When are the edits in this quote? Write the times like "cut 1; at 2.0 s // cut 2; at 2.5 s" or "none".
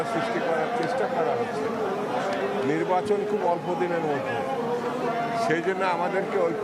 none